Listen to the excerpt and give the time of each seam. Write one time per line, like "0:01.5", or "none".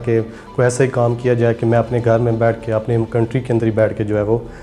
none